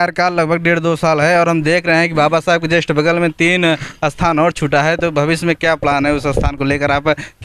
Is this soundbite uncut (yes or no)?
yes